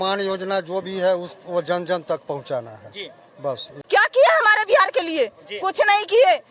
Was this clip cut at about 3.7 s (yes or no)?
yes